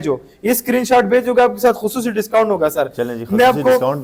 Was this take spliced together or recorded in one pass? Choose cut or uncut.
uncut